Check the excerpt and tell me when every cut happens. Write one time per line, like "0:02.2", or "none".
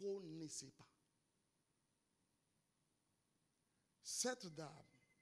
0:02.2